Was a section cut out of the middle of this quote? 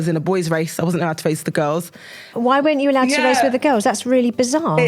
yes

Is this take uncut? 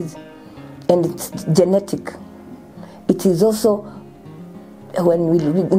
yes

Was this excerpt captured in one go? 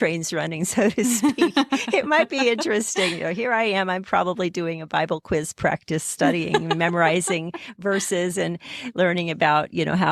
yes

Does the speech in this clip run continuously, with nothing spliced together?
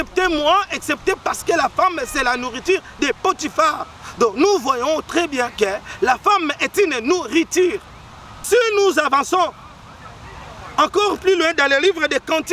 yes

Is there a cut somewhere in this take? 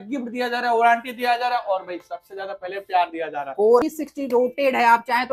yes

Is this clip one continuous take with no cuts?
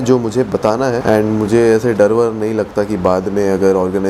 yes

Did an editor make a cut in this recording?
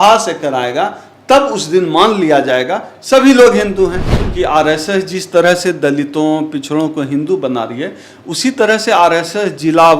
yes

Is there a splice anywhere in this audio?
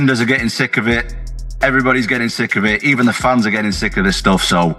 no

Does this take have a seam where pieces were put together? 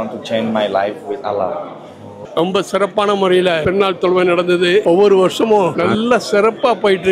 yes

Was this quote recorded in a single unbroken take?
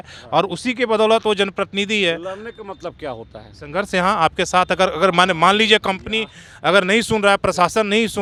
yes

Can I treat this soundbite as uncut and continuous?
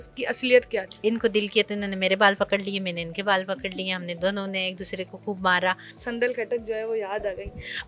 no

